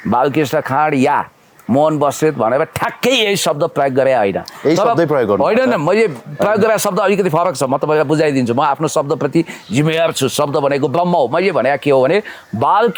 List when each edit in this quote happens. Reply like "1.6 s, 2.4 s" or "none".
none